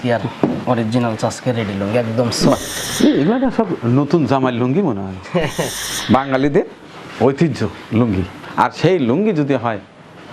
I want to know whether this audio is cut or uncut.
cut